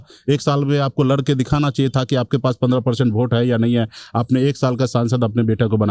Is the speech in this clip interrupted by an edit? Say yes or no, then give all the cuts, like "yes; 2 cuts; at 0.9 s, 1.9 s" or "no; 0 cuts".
no; 0 cuts